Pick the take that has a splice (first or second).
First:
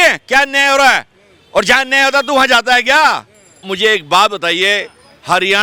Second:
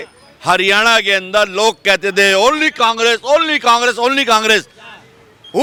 first